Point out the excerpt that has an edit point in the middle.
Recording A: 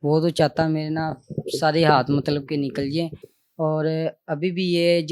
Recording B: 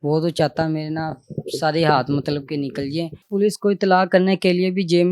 B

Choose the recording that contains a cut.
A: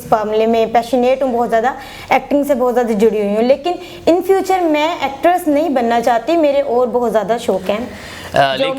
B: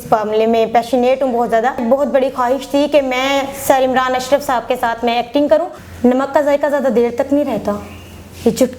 B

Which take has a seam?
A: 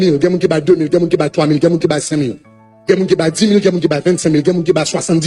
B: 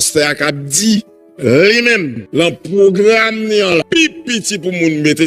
B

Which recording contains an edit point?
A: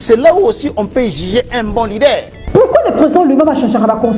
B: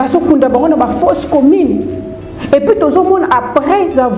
A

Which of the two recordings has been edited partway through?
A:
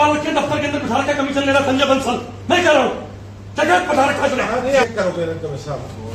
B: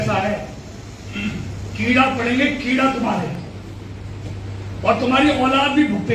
A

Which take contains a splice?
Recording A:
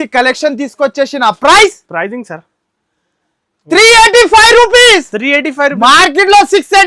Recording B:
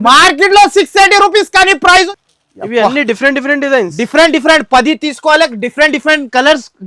B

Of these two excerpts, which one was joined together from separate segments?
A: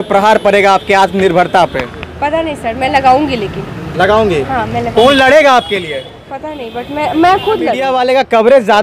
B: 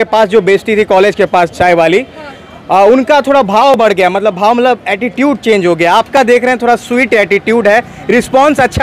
A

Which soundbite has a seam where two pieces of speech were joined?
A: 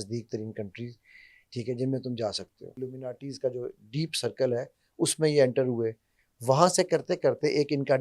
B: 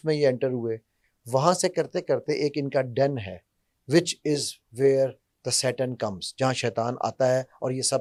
A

